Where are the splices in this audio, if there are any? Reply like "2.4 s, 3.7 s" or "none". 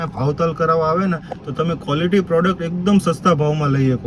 none